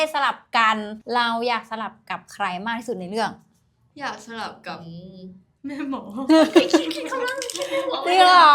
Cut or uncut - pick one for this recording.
uncut